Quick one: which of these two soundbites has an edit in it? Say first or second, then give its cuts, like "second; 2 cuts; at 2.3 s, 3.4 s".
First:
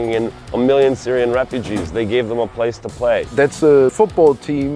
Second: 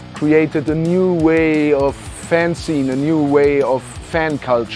first; 1 cut; at 3.3 s